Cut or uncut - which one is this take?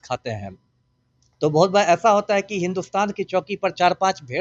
uncut